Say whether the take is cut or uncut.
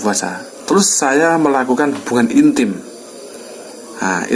uncut